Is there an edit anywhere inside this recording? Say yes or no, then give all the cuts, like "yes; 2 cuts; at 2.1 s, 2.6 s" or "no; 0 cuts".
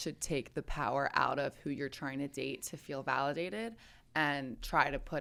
no; 0 cuts